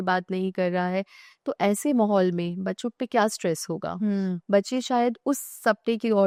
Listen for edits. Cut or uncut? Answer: uncut